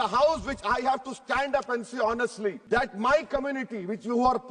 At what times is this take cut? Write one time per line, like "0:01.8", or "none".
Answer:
0:02.6